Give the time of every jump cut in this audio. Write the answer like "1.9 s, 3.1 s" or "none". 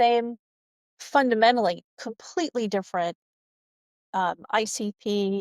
none